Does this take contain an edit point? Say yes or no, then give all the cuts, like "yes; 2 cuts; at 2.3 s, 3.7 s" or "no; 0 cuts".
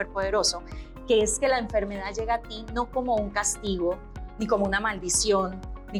no; 0 cuts